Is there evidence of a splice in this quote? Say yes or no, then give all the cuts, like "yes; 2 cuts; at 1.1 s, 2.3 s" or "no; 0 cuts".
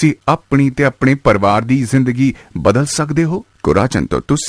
yes; 1 cut; at 3.5 s